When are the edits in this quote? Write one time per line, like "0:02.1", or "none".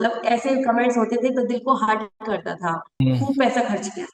0:03.0